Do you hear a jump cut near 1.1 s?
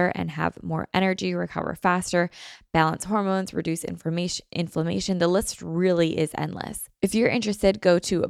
no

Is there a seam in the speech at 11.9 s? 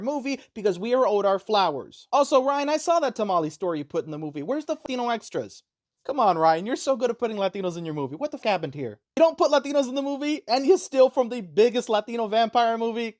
no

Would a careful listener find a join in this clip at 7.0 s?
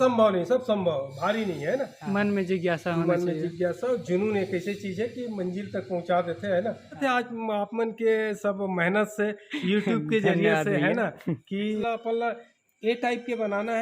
yes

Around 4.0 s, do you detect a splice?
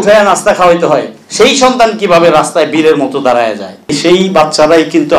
yes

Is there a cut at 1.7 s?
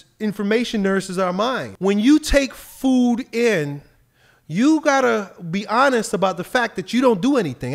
yes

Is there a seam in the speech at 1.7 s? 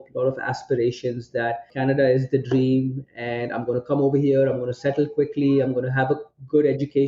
yes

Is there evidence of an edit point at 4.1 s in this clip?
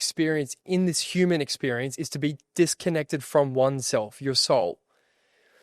no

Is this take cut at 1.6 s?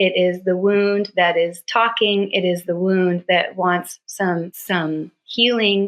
no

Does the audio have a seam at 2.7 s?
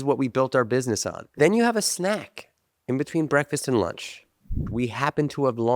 no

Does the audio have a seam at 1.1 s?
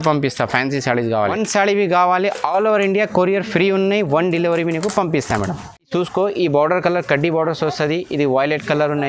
yes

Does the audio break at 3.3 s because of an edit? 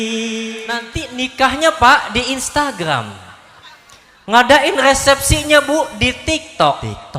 no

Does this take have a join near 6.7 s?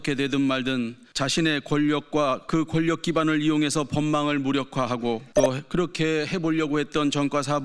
no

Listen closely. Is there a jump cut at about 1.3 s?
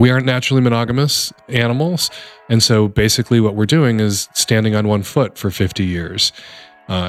yes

